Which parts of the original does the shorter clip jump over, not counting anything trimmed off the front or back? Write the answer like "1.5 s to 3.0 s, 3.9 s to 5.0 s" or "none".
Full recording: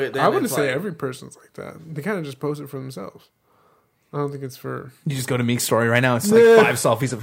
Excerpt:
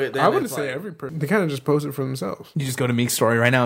1.0 s to 1.8 s, 3.2 s to 5.0 s